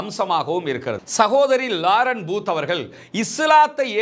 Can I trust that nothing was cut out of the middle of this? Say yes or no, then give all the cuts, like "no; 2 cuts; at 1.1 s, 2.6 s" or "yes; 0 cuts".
no; 1 cut; at 1.0 s